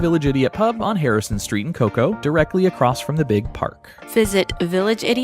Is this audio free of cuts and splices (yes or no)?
no